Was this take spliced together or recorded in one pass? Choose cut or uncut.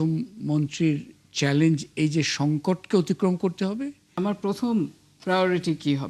cut